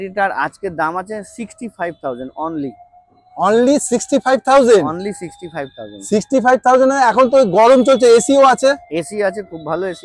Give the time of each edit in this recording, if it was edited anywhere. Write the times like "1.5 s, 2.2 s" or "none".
none